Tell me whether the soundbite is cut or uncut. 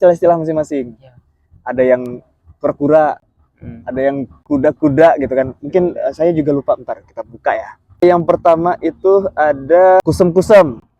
cut